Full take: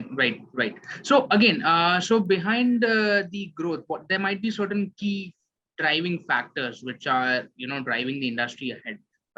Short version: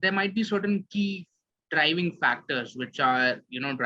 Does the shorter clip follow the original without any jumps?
yes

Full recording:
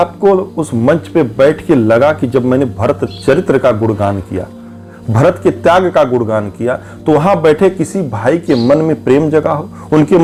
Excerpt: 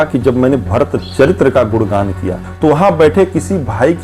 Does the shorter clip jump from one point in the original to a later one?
yes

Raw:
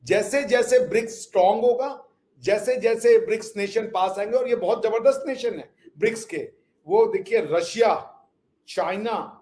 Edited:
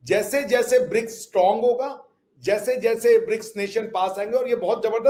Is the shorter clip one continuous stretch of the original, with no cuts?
yes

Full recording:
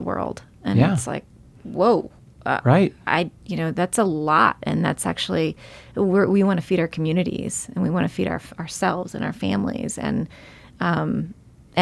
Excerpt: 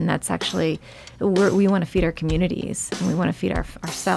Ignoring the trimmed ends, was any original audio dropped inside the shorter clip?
no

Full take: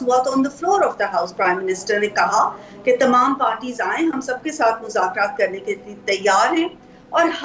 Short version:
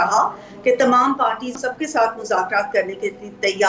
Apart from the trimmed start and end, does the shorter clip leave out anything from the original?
yes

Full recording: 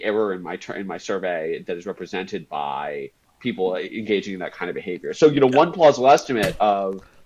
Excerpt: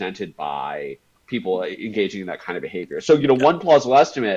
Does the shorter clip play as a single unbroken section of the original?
yes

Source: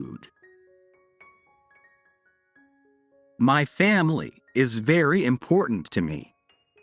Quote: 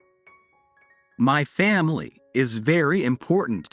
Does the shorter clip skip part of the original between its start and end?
yes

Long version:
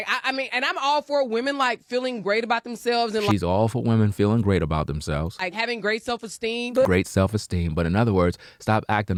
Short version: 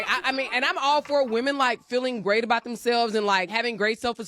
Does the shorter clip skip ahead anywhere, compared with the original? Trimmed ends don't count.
yes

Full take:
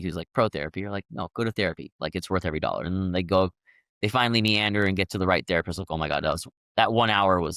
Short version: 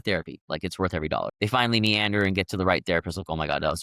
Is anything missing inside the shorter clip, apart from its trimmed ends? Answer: yes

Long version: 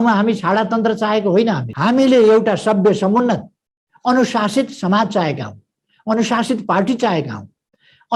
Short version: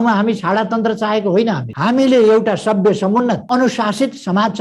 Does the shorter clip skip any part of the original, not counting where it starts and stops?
yes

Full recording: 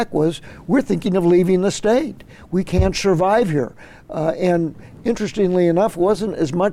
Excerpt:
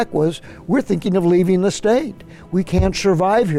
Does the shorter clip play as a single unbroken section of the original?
yes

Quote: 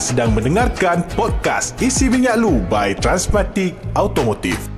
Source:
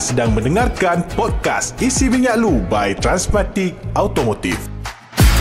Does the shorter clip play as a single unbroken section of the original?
yes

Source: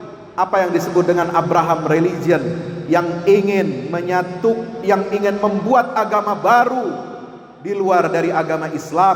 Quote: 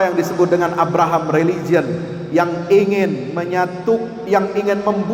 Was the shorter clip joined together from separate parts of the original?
no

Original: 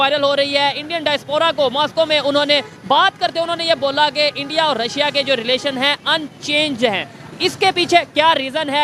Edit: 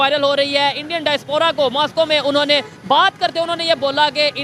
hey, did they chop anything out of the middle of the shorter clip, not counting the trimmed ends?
no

